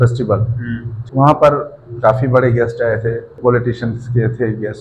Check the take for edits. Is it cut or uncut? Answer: cut